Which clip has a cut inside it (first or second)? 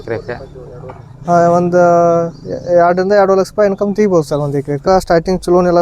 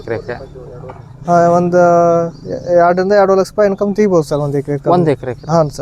first